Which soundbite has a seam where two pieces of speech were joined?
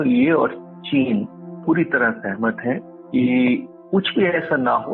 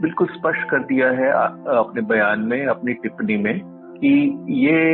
first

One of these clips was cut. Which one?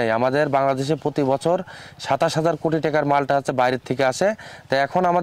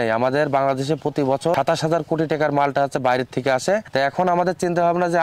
second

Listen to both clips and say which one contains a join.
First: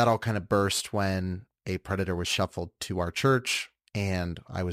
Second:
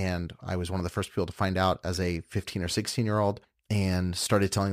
second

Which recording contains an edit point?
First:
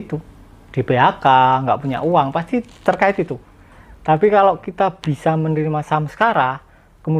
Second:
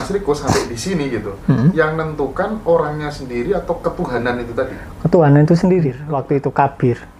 second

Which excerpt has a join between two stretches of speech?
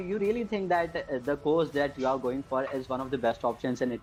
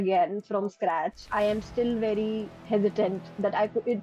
second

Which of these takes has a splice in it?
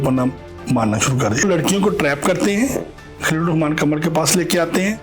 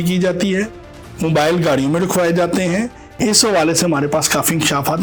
first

